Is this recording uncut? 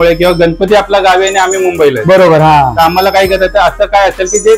yes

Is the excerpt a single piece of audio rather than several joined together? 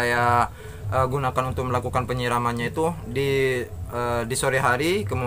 yes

